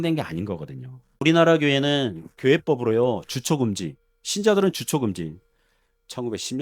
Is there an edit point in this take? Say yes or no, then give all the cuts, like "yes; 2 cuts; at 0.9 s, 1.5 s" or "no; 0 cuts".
yes; 1 cut; at 1.2 s